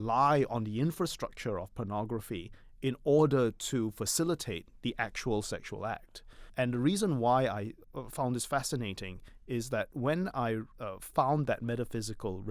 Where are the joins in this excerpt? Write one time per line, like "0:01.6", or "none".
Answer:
0:06.5
0:07.8
0:10.8